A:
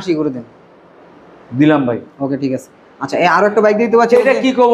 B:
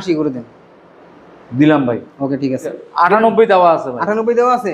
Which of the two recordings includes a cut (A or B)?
B